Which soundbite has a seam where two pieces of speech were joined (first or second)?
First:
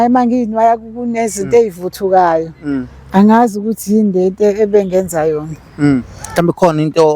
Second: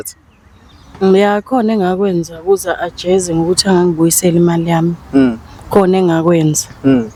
first